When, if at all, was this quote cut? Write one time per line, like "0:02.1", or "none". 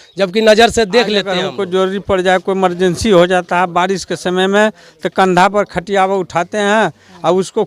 0:01.4